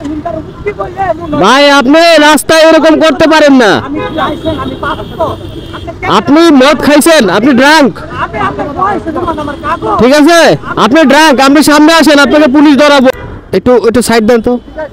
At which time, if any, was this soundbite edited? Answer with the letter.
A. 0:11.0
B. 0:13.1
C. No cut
B